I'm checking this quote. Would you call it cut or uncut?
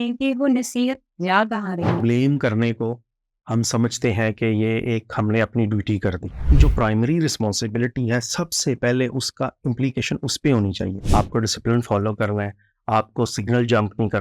cut